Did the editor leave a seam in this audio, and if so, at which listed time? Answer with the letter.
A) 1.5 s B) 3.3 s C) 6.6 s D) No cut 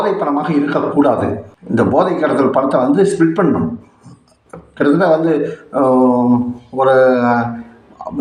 D